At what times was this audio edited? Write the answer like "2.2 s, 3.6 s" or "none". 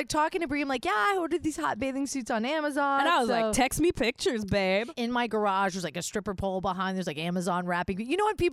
4.9 s